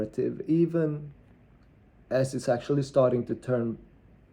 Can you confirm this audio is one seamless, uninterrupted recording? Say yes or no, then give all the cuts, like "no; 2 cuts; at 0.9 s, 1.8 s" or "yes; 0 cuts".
yes; 0 cuts